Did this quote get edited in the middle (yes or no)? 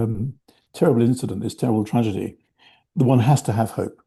no